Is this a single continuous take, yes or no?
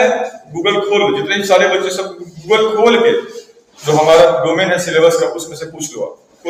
yes